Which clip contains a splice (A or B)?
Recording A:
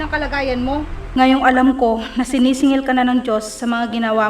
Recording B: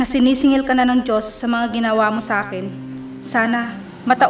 A